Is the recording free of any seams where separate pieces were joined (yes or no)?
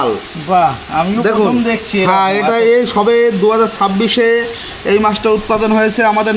yes